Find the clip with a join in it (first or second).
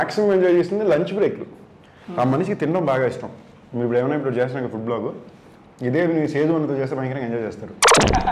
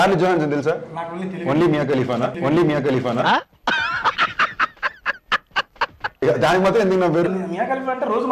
second